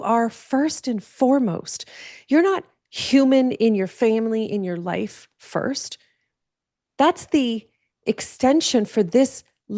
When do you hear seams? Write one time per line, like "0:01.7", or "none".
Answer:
none